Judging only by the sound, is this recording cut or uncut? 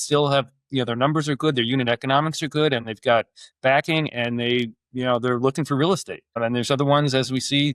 cut